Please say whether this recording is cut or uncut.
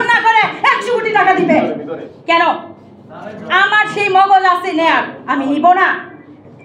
uncut